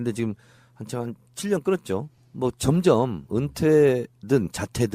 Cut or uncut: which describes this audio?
cut